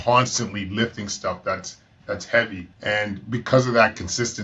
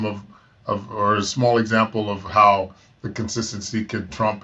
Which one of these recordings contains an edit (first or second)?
first